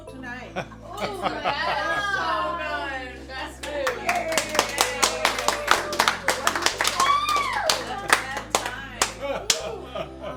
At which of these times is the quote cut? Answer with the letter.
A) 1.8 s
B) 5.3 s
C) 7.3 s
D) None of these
D